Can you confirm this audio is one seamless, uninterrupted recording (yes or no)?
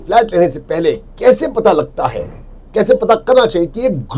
yes